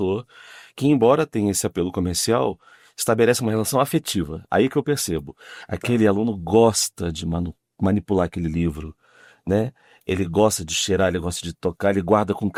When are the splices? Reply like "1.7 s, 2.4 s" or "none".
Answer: none